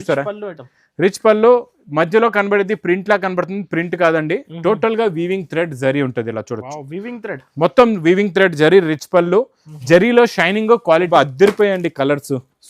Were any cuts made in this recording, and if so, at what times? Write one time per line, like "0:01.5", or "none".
0:11.1